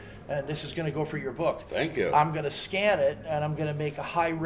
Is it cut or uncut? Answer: cut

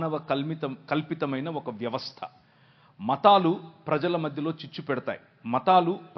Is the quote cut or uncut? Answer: uncut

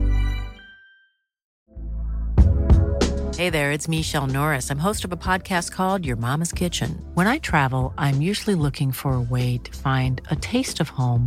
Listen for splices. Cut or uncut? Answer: cut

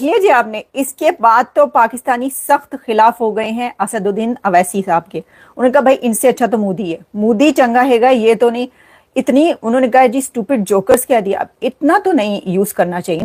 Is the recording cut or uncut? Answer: uncut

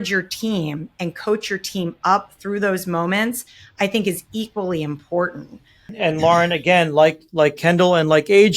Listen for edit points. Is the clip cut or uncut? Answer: cut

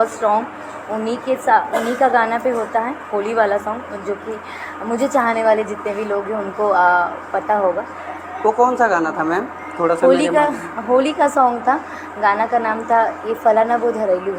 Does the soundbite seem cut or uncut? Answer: uncut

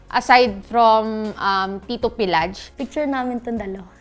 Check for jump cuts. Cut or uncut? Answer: cut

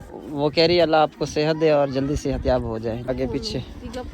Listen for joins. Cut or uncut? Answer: cut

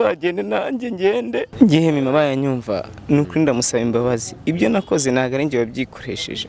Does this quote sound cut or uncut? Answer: cut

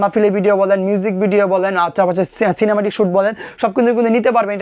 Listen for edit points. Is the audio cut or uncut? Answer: uncut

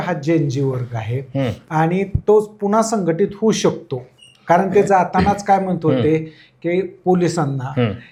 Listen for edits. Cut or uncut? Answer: uncut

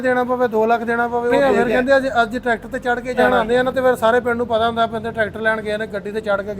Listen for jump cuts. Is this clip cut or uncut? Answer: cut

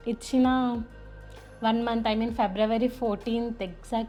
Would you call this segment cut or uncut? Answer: uncut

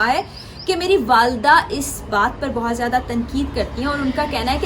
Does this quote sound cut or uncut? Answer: uncut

